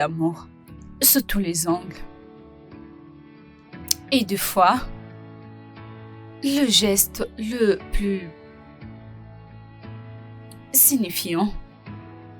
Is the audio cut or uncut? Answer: cut